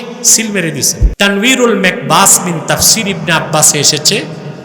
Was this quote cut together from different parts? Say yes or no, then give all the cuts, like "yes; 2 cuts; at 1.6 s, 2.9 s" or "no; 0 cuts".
yes; 1 cut; at 1.1 s